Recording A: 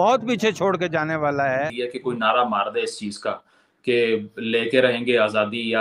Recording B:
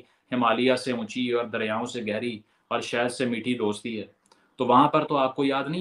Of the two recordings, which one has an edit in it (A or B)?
A